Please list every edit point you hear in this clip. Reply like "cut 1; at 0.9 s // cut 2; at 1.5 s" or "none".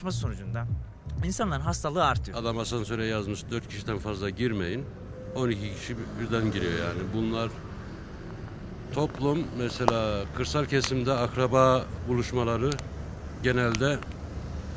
cut 1; at 2.3 s

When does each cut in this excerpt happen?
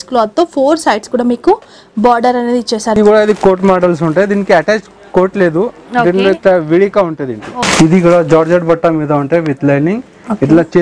cut 1; at 3.0 s // cut 2; at 7.5 s

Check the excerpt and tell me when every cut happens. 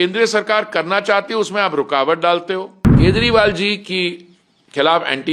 cut 1; at 2.8 s

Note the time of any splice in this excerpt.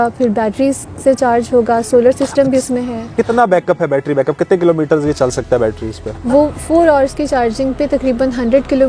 cut 1; at 3.1 s // cut 2; at 6.1 s

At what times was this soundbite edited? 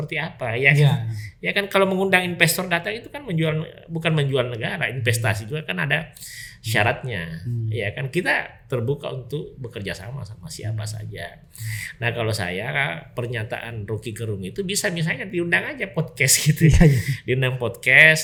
none

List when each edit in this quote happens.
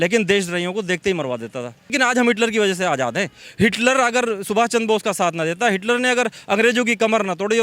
cut 1; at 1.9 s

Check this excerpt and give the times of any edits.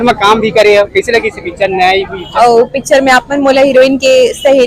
cut 1; at 2.2 s

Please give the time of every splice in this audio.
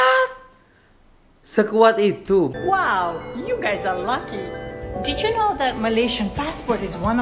cut 1; at 2.5 s

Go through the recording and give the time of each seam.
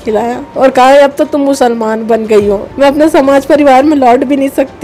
cut 1; at 2.7 s

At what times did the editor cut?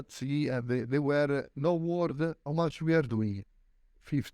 cut 1; at 1.5 s // cut 2; at 2.4 s

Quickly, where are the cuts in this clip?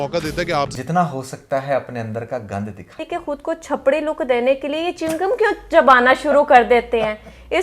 cut 1; at 3.0 s

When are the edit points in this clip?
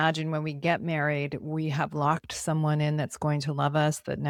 none

